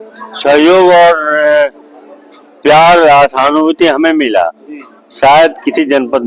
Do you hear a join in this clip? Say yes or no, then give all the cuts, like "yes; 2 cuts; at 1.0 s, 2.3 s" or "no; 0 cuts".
no; 0 cuts